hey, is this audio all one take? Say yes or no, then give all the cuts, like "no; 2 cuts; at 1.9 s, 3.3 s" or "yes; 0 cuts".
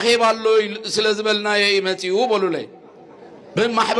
yes; 0 cuts